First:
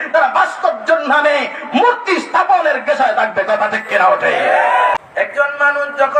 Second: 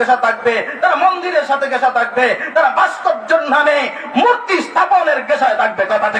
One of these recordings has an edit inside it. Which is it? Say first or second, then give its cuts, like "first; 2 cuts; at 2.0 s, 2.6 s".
first; 1 cut; at 4.9 s